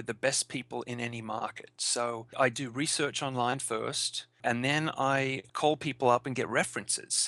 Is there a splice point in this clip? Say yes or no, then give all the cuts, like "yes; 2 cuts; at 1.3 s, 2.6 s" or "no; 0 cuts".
yes; 3 cuts; at 2.3 s, 4.4 s, 5.4 s